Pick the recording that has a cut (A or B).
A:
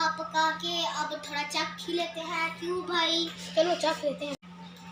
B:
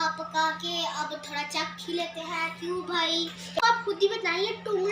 B